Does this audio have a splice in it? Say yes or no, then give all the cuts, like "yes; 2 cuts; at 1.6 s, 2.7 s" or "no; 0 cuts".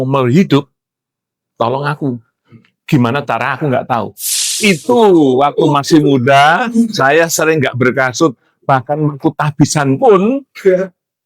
yes; 1 cut; at 4.6 s